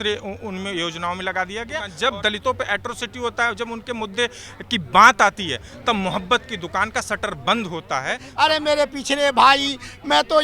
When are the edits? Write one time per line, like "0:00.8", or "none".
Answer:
0:01.9
0:08.3